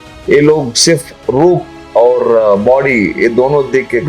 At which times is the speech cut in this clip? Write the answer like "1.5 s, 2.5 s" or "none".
1.7 s